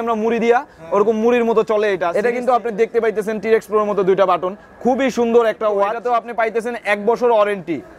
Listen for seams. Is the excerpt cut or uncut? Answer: cut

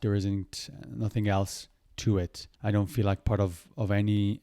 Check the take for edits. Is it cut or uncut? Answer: cut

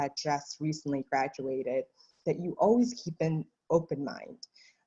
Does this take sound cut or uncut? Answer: uncut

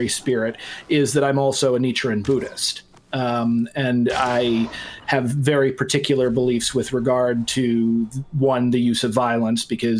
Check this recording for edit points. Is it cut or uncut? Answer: uncut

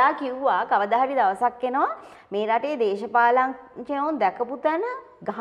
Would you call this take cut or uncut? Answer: uncut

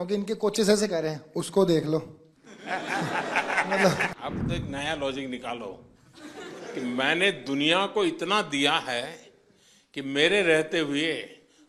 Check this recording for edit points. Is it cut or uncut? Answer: cut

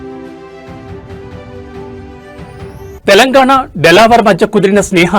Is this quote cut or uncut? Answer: cut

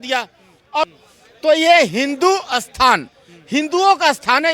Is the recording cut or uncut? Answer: cut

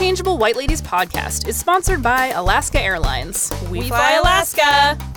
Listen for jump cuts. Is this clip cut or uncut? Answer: uncut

